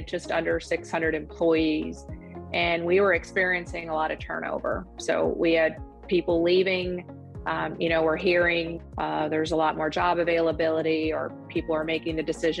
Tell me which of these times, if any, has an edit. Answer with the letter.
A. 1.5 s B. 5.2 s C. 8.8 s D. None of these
C